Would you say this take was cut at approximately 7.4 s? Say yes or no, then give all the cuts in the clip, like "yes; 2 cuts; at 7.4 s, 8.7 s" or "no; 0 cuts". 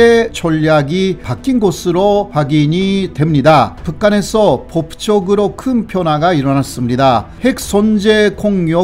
no; 1 cut; at 3.8 s